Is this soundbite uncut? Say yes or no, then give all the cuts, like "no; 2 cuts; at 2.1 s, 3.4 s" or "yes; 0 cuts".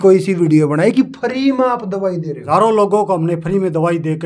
no; 1 cut; at 2.4 s